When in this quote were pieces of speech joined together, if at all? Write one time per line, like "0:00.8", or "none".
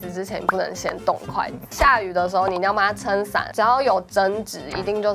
0:01.7
0:03.5